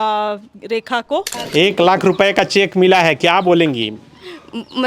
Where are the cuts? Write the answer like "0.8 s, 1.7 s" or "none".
1.4 s